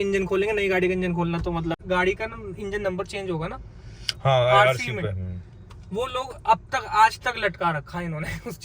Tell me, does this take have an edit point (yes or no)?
yes